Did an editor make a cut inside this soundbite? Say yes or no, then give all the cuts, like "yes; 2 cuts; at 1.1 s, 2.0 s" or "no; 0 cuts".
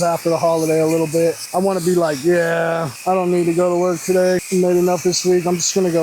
yes; 3 cuts; at 1.4 s, 2.9 s, 4.5 s